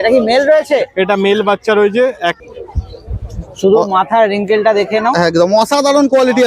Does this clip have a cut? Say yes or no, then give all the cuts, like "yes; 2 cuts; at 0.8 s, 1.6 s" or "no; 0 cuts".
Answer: yes; 1 cut; at 2.9 s